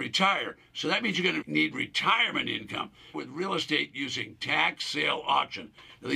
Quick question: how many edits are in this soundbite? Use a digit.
2